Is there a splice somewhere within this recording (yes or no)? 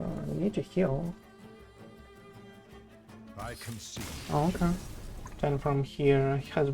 yes